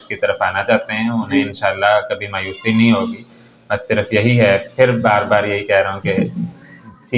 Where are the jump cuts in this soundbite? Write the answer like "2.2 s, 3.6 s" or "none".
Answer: none